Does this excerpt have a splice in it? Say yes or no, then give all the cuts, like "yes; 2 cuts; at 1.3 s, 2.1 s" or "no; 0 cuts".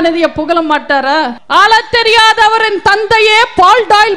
yes; 1 cut; at 1.4 s